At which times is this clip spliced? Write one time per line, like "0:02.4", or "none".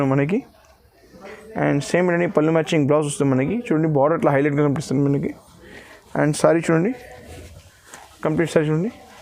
none